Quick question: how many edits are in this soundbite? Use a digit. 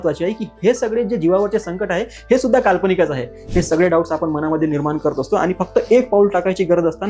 1